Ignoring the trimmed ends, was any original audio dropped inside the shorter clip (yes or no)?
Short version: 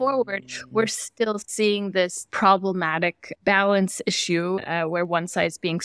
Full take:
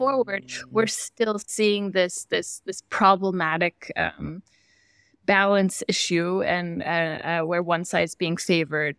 yes